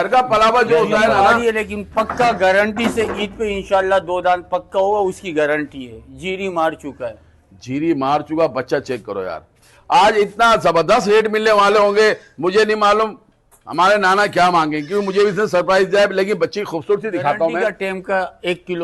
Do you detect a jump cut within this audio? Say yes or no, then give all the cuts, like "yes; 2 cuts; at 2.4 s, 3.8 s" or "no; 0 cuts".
yes; 2 cuts; at 1.2 s, 17.6 s